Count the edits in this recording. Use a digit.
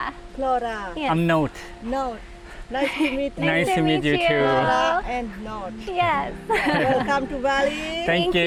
0